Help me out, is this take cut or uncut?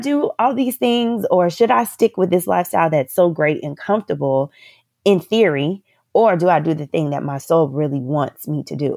uncut